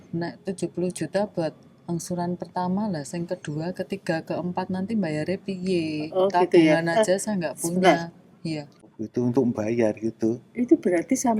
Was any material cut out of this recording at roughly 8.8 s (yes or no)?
yes